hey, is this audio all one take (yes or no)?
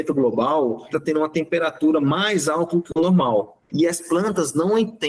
no